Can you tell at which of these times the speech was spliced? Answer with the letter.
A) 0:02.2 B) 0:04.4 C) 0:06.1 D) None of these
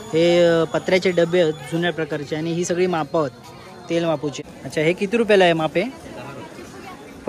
B